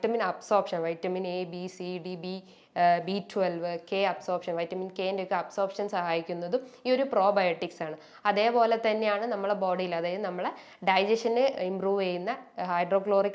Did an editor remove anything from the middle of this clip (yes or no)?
no